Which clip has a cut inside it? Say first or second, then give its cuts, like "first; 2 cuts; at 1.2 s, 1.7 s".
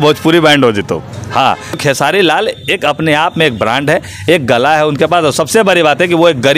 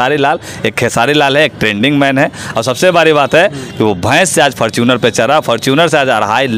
first; 1 cut; at 1.8 s